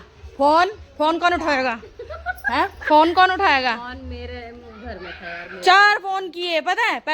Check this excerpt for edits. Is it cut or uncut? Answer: uncut